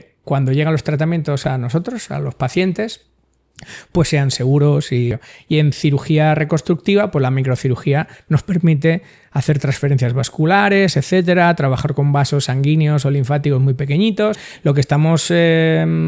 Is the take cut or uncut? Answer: cut